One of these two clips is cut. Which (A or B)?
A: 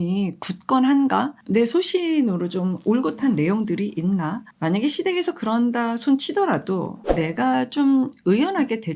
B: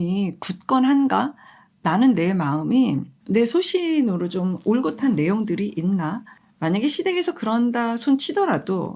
A